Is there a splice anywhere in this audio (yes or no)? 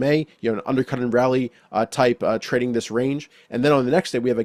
no